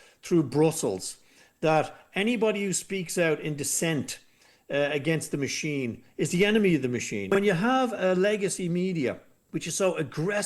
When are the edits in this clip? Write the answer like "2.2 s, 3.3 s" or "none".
7.3 s